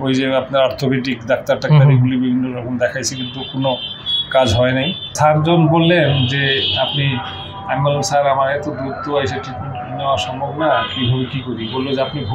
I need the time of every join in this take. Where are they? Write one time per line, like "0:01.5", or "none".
0:05.1